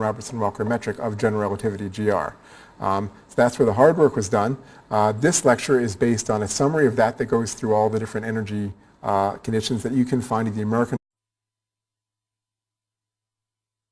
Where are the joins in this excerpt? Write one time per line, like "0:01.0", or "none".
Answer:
none